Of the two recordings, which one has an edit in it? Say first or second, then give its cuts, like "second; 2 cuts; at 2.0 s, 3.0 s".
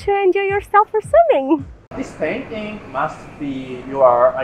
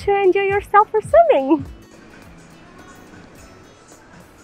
first; 1 cut; at 1.8 s